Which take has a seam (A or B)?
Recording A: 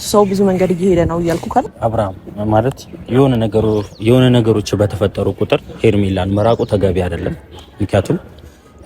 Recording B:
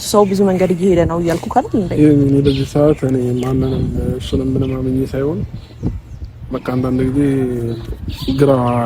A